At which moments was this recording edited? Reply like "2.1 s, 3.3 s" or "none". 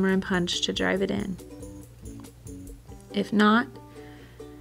1.4 s, 3.1 s